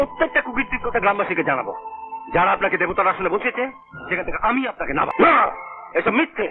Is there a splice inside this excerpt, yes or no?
yes